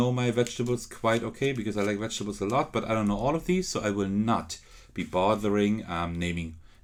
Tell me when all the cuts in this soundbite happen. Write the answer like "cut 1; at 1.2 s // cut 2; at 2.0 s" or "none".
none